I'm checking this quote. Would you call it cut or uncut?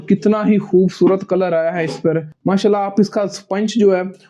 cut